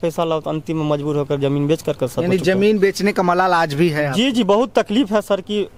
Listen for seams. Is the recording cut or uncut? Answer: uncut